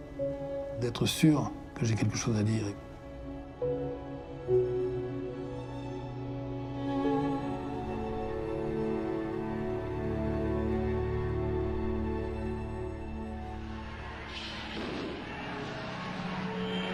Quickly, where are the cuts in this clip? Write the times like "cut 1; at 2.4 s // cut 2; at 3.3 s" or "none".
none